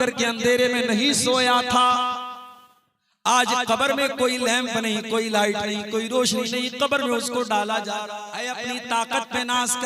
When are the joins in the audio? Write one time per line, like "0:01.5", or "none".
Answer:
0:08.5

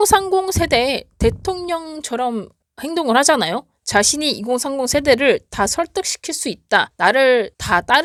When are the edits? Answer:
none

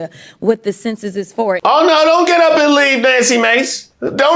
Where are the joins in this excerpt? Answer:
0:01.6

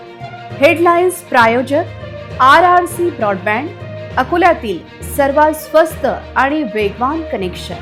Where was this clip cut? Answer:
none

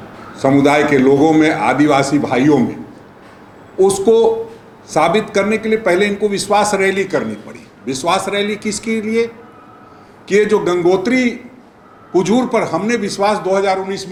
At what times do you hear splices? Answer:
none

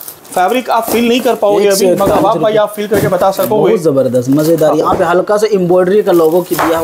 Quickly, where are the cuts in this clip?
none

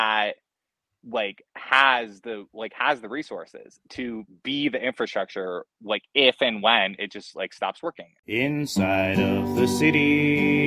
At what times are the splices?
0:08.1

